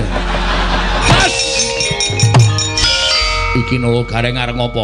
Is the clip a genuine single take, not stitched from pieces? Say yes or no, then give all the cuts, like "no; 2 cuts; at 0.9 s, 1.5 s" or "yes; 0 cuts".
no; 2 cuts; at 1.0 s, 2.8 s